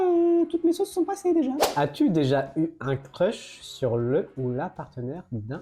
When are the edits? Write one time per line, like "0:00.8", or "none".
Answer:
0:01.6